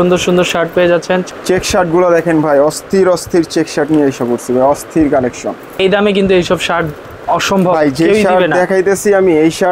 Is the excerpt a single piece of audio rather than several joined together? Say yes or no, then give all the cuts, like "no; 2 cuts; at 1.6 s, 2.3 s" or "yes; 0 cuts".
no; 2 cuts; at 1.2 s, 5.8 s